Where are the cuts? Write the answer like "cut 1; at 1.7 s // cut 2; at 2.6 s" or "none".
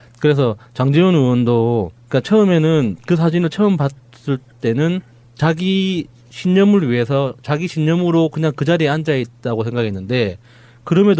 none